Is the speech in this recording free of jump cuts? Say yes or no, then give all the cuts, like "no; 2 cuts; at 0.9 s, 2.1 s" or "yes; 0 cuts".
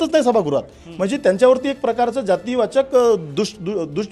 yes; 0 cuts